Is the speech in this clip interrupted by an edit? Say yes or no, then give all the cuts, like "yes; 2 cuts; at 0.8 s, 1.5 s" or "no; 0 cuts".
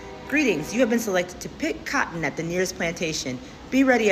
no; 0 cuts